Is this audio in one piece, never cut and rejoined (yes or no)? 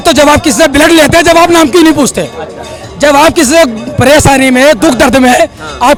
yes